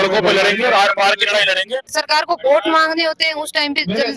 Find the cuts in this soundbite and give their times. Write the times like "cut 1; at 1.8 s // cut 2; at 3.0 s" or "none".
cut 1; at 1.9 s

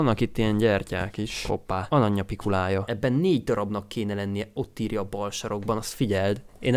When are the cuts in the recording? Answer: none

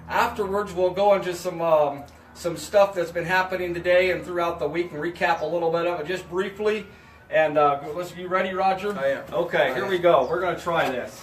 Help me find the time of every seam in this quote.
cut 1; at 4.2 s

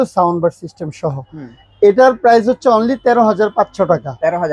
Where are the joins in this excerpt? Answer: none

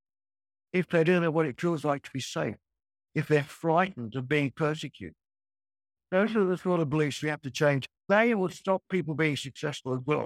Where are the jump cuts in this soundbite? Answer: cut 1; at 5.9 s // cut 2; at 7.9 s

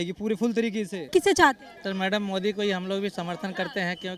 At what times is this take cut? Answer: cut 1; at 1.0 s

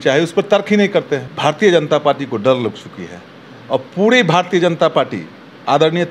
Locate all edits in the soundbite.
cut 1; at 1.3 s

